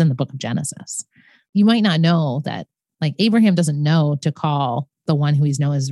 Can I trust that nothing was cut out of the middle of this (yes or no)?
no